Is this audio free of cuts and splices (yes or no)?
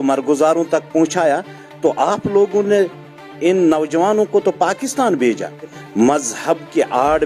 no